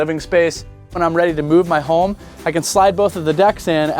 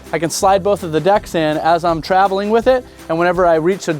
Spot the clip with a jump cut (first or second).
first